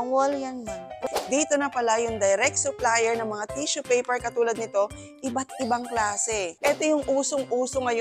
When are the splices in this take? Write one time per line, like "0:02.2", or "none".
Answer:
0:01.0
0:06.5